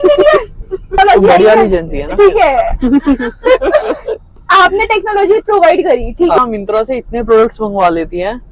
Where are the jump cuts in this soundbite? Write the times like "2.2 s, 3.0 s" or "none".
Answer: 0.9 s, 6.4 s

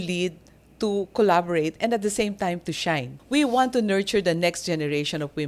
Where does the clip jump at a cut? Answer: 3.1 s

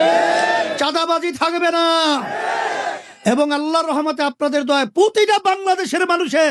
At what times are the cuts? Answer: none

